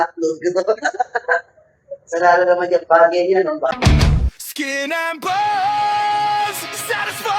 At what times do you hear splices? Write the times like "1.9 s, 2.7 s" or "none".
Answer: 3.7 s